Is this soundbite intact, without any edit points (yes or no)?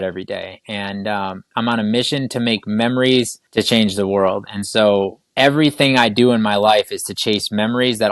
no